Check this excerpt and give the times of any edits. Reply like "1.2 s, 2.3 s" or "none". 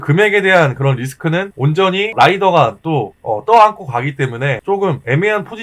1.6 s, 3.2 s, 4.9 s